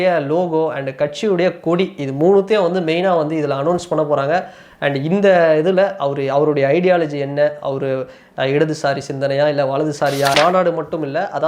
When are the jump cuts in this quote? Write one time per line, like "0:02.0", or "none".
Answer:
0:10.3